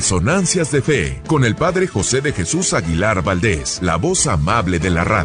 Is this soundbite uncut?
no; 2 cuts; at 1.1 s, 3.7 s

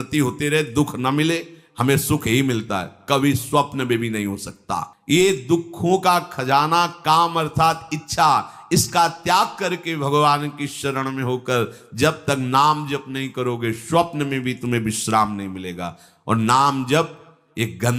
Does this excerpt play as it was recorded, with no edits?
yes; 0 cuts

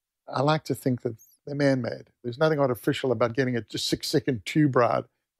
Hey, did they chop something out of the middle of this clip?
no; 0 cuts

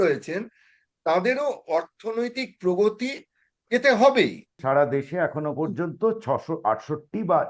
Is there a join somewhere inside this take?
yes; 1 cut; at 4.5 s

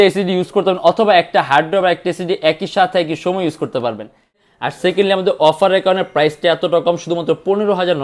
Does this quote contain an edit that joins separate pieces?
yes; 1 cut; at 4.4 s

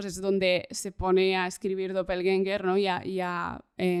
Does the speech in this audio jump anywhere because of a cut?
no; 0 cuts

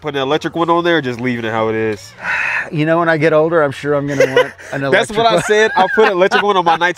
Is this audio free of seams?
yes; 0 cuts

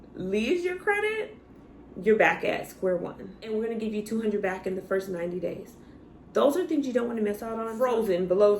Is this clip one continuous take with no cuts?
no; 2 cuts; at 3.4 s, 7.7 s

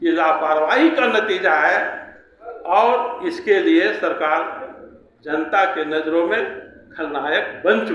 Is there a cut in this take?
no; 0 cuts

